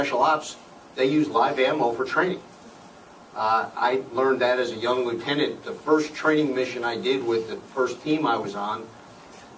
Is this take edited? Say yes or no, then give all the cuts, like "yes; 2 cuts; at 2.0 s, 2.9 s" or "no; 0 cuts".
no; 0 cuts